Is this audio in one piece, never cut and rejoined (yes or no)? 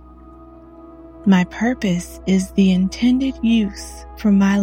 no